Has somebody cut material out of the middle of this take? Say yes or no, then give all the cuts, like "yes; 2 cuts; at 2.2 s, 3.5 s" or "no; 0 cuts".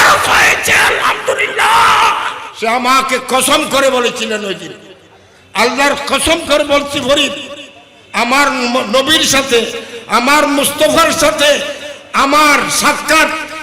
yes; 1 cut; at 2.4 s